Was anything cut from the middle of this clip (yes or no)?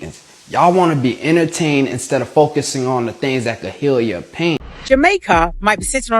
yes